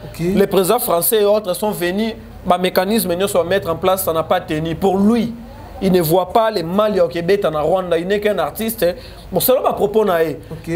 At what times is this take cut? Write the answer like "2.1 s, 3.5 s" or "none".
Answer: none